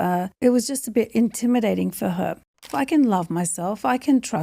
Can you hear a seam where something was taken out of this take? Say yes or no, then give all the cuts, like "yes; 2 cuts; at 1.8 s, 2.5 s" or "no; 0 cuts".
yes; 1 cut; at 2.4 s